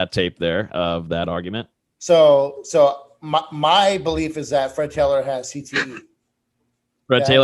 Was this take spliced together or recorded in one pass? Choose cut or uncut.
uncut